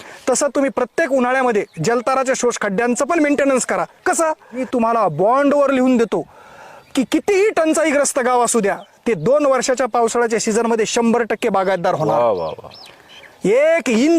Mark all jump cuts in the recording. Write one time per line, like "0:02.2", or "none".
0:04.6